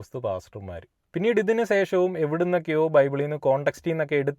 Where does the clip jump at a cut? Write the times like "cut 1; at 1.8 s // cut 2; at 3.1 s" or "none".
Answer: none